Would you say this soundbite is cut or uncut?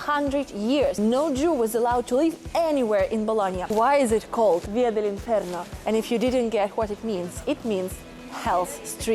cut